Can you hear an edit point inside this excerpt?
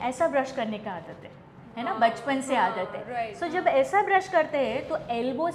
no; 0 cuts

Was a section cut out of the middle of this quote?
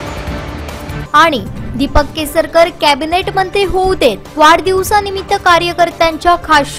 yes; 1 cut; at 1.0 s

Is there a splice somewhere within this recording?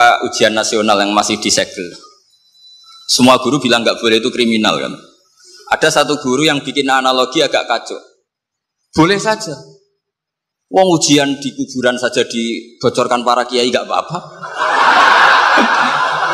no; 0 cuts

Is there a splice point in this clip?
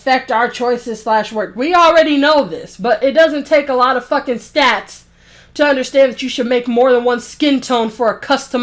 no; 0 cuts

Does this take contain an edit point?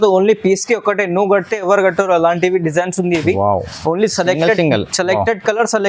no; 0 cuts

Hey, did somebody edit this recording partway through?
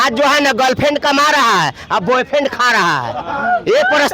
no; 0 cuts

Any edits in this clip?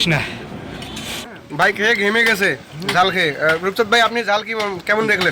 yes; 1 cut; at 1.4 s

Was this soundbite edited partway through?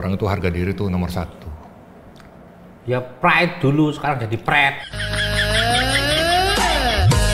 no; 0 cuts

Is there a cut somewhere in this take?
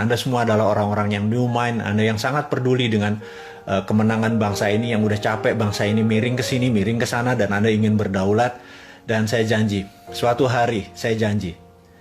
no; 0 cuts

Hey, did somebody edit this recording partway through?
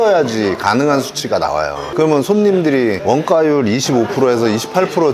no; 0 cuts

